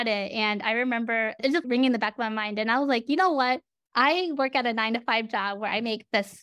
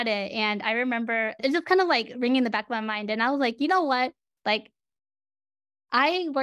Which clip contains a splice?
first; 2 cuts; at 1.6 s, 3.8 s

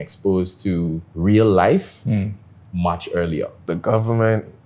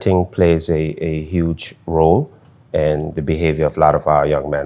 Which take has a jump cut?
first; 2 cuts; at 1.1 s, 3.6 s

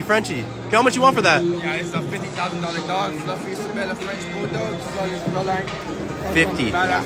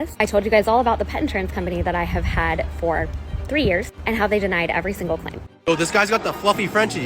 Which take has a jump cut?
second; 1 cut; at 5.5 s

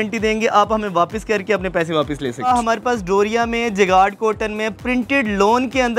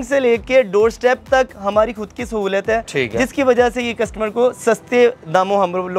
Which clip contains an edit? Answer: first; 1 cut; at 2.5 s

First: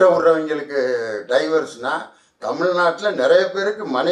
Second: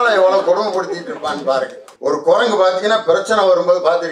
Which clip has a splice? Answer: second; 1 cut; at 1.8 s

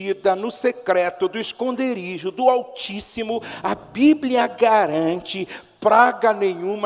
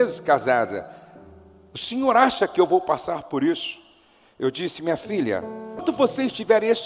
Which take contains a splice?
second; 1 cut; at 5.8 s

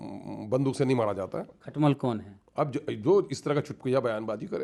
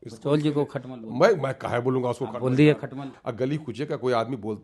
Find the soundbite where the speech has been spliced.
second; 1 cut; at 3.1 s

